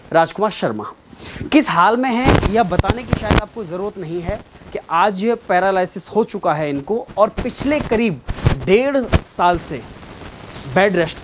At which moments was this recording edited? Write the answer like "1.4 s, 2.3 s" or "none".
none